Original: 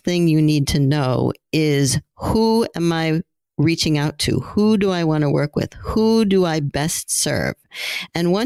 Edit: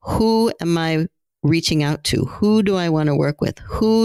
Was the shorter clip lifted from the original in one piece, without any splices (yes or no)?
yes